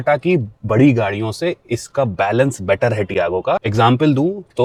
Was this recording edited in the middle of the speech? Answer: no; 0 cuts

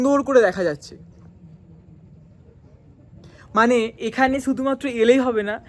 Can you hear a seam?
no; 0 cuts

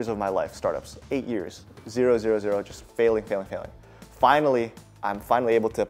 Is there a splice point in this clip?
no; 0 cuts

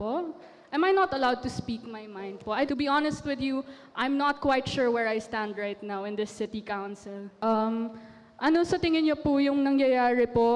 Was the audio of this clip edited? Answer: yes; 2 cuts; at 2.7 s, 7.3 s

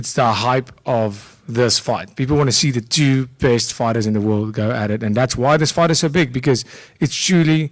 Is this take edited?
no; 0 cuts

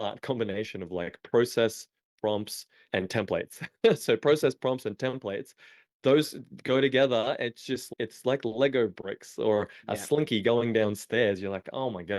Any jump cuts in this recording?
yes; 2 cuts; at 2.8 s, 7.9 s

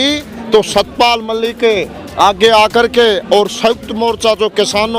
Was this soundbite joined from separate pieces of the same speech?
no; 0 cuts

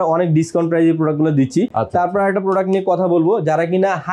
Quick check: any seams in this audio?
no; 0 cuts

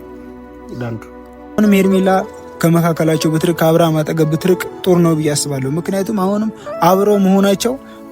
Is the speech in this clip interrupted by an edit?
yes; 1 cut; at 1.6 s

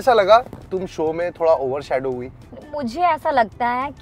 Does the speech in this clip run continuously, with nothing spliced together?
yes; 0 cuts

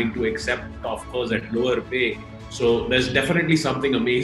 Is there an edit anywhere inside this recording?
no; 0 cuts

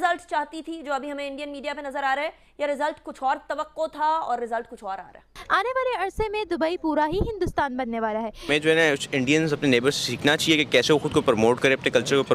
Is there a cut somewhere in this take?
yes; 2 cuts; at 5.4 s, 8.4 s

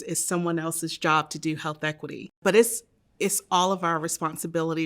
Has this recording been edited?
yes; 1 cut; at 2.4 s

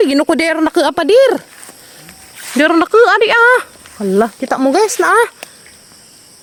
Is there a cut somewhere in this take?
no; 0 cuts

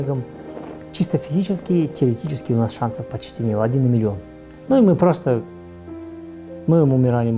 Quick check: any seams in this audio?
yes; 2 cuts; at 0.9 s, 4.6 s

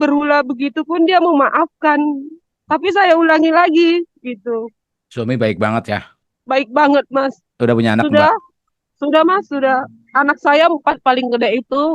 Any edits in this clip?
no; 0 cuts

